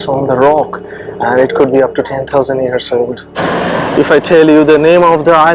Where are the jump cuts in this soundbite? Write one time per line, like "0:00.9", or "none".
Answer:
0:03.2